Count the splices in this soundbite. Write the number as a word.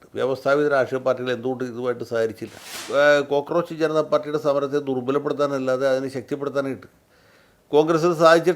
one